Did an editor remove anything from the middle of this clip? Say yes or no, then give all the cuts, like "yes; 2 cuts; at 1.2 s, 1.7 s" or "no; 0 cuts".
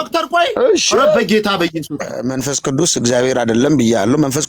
yes; 1 cut; at 2.2 s